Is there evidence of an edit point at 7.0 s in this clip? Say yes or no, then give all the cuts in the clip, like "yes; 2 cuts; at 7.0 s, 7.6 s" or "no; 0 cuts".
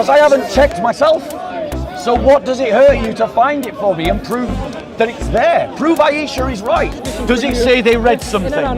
yes; 1 cut; at 7.0 s